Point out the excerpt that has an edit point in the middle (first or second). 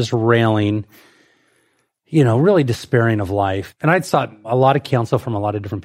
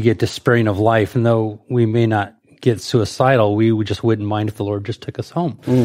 first